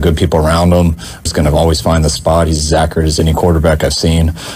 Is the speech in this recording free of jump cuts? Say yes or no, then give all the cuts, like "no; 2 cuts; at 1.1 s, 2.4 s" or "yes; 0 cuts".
no; 1 cut; at 1.3 s